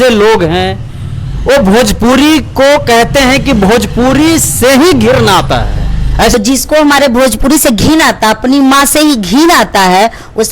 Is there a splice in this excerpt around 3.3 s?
no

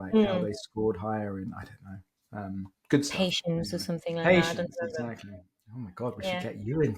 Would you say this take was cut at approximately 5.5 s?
no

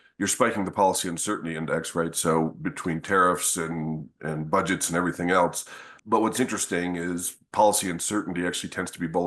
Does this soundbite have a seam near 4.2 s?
no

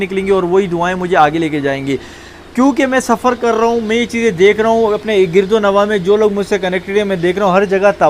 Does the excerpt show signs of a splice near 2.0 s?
no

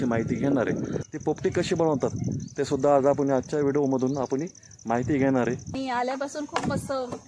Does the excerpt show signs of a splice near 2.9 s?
no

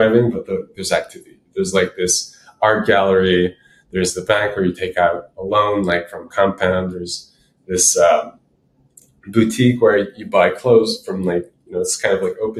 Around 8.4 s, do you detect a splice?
no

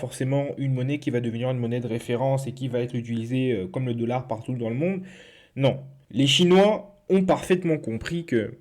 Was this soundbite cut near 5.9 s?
yes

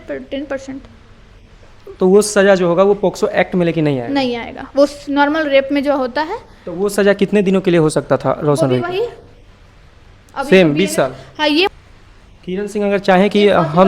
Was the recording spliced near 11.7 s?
yes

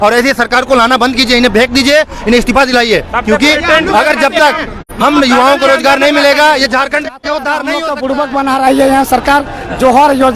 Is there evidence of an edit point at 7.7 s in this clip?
yes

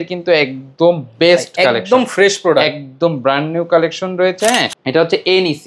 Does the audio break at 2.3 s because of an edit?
no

